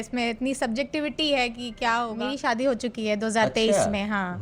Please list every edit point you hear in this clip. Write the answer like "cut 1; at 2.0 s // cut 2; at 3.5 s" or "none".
cut 1; at 2.4 s